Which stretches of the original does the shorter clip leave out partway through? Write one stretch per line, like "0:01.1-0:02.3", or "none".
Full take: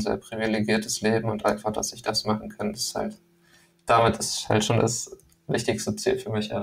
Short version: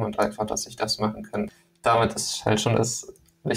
0:02.8-0:03.6